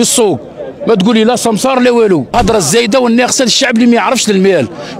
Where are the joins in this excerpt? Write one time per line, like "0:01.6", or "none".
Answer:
0:02.3

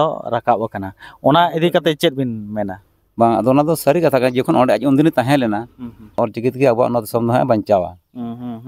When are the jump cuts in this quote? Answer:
0:06.2

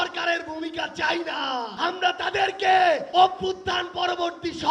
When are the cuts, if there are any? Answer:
0:01.7
0:03.1

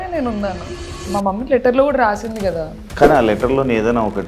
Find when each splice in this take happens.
0:02.7

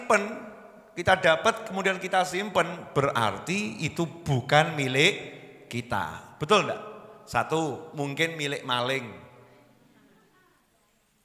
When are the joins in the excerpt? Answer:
none

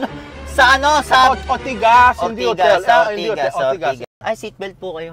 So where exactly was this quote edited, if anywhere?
0:04.1

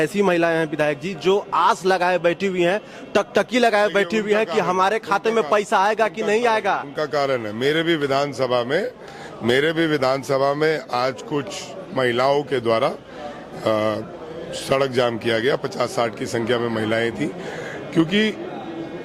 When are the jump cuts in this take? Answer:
none

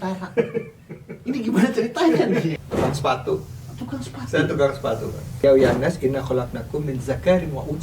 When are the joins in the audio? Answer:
0:02.5
0:05.3

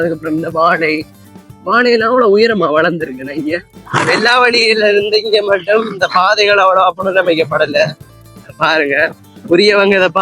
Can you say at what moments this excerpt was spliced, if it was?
0:03.7

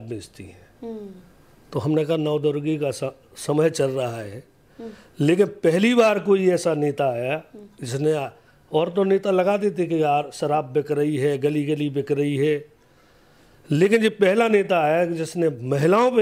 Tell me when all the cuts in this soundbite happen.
none

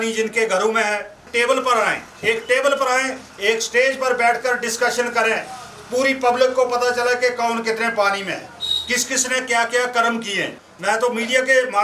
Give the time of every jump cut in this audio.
0:01.3
0:10.6

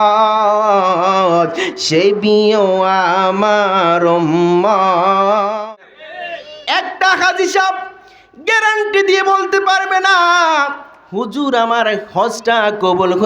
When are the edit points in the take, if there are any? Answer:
0:05.6

